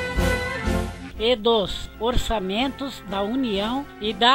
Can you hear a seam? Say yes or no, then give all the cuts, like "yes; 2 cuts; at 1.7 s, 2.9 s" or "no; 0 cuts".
yes; 1 cut; at 1.0 s